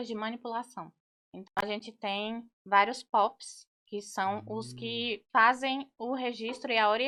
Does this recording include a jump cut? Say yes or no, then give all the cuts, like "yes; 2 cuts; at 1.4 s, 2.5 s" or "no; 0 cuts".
no; 0 cuts